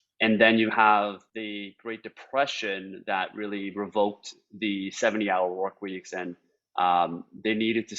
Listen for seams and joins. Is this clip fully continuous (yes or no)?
no